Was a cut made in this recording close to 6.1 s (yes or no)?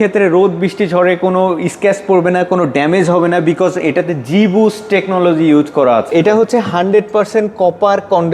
yes